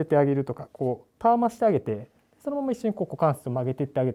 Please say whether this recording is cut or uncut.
uncut